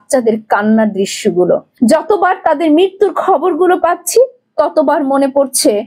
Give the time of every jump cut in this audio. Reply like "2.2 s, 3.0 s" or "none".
1.7 s